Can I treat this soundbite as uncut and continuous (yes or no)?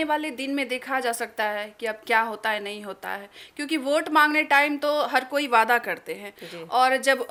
yes